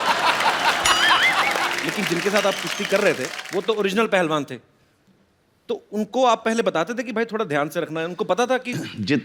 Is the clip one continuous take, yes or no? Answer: no